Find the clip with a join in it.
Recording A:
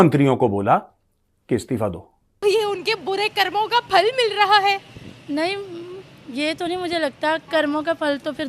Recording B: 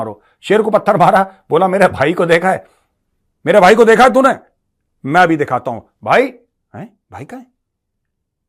A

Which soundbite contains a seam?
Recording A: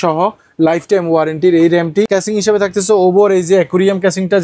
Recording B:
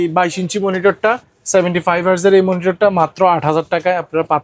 A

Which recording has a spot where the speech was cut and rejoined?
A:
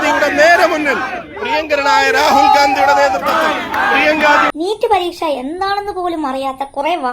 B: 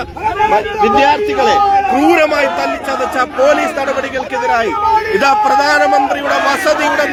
A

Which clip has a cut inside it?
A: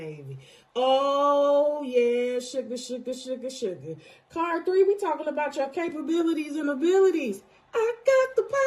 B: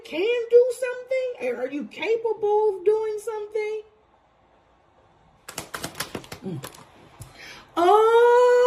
B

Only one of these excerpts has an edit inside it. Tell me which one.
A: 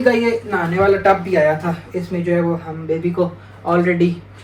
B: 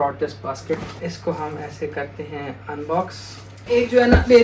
B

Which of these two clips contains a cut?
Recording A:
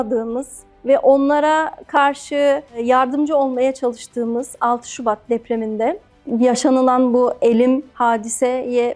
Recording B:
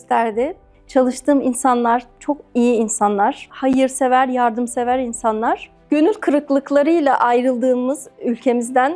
B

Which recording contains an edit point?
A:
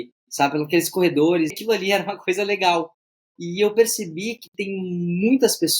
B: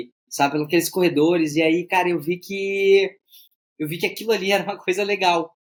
A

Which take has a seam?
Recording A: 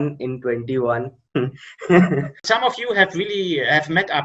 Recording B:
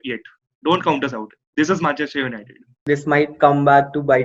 A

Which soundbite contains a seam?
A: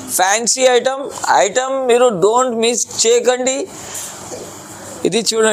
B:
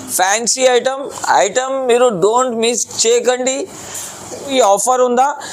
B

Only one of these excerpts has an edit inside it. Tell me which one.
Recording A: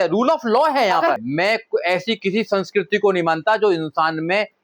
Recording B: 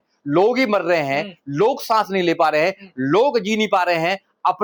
A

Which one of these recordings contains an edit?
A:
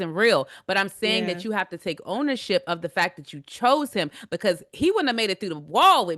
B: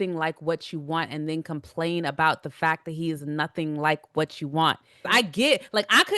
B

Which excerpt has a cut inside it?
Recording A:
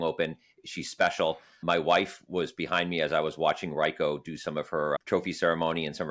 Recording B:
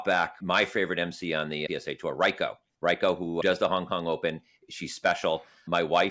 B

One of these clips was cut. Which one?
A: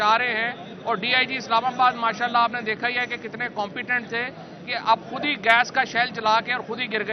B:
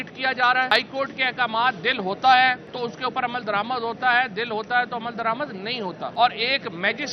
B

